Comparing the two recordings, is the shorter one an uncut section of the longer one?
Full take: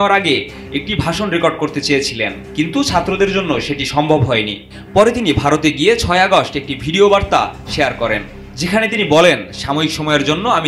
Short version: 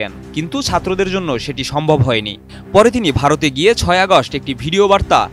yes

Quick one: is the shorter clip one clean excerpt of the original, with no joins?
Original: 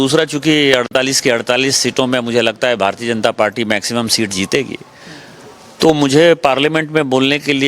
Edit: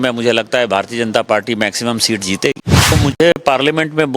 no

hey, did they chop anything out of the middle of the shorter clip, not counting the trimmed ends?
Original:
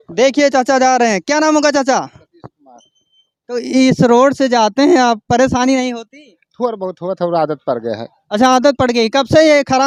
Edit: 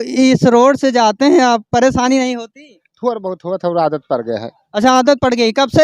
no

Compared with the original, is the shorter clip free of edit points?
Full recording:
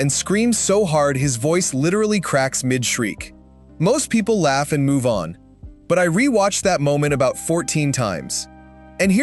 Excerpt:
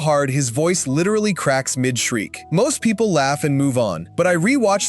no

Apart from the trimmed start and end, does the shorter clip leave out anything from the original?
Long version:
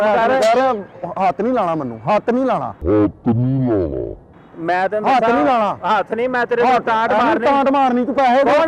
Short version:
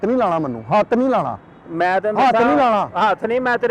yes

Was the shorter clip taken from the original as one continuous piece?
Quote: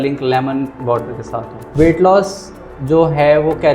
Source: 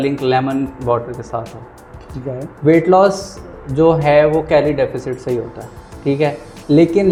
no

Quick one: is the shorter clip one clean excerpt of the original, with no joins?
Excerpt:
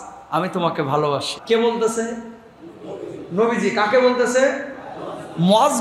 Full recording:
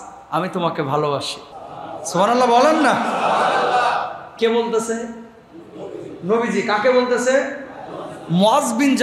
no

